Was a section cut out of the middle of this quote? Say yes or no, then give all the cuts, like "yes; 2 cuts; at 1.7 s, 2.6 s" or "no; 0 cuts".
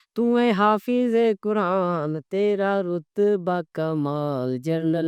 no; 0 cuts